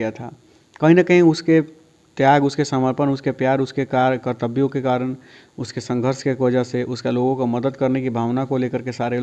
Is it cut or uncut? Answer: uncut